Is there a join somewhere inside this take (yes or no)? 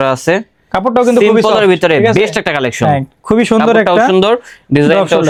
no